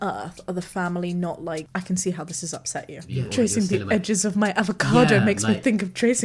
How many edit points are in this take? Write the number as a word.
two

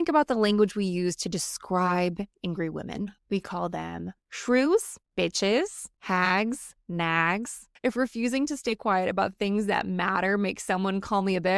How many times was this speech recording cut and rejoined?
five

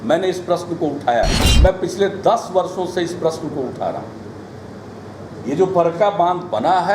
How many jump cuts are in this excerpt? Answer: one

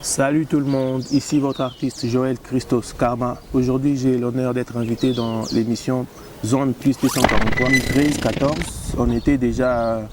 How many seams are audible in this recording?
one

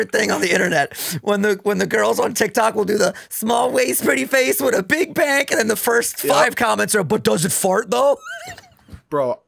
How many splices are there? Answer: zero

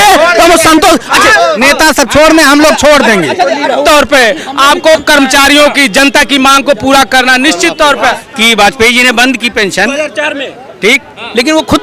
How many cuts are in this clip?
two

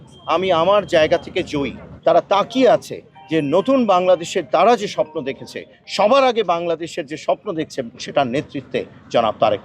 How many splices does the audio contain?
two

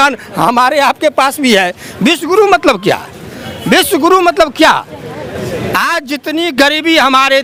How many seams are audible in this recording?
zero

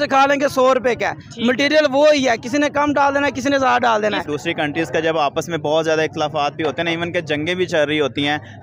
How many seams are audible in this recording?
one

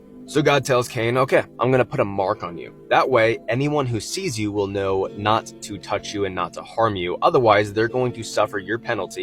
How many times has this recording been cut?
zero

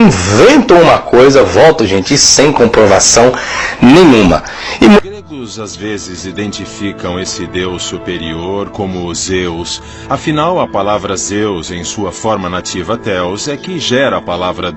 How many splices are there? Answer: one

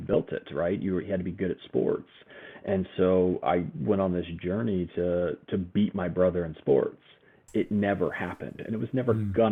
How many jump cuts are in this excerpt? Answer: zero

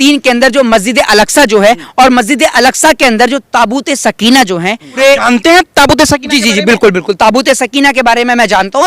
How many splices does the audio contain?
one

